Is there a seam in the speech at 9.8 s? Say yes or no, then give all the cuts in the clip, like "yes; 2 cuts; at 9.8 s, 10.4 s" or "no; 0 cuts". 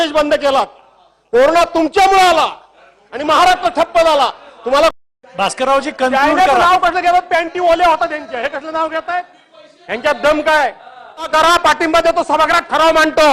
no; 2 cuts; at 4.9 s, 11.3 s